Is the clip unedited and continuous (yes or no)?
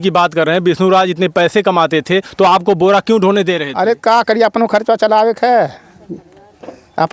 yes